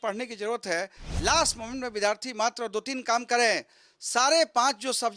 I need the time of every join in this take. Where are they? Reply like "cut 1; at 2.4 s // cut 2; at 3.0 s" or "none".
cut 1; at 1.0 s